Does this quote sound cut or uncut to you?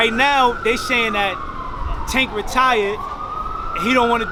uncut